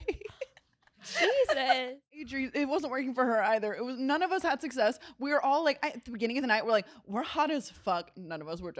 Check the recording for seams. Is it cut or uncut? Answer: uncut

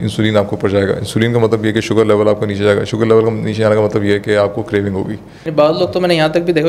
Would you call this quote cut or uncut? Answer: cut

